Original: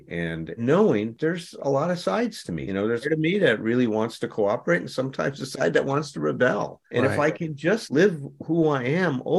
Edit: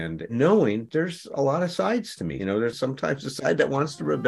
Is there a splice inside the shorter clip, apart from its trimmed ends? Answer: yes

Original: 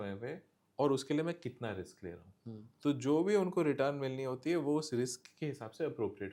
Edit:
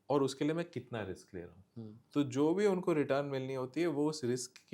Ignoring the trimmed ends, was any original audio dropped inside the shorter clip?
no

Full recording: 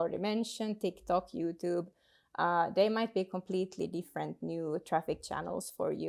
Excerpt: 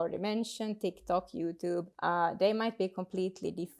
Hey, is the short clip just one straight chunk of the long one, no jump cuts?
no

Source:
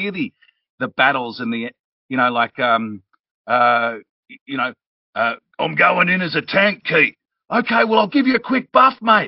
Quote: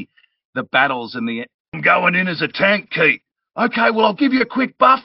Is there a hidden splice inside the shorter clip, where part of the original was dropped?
yes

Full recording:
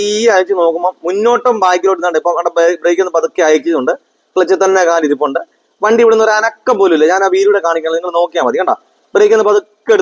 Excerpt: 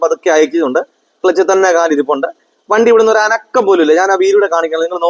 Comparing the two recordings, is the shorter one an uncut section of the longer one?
yes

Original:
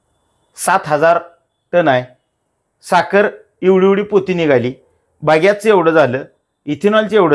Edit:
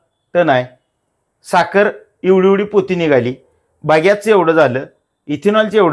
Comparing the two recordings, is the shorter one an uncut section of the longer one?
yes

